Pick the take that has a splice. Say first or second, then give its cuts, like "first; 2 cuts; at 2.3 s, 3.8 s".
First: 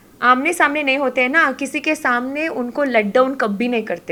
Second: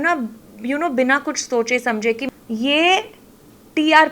second; 1 cut; at 2.2 s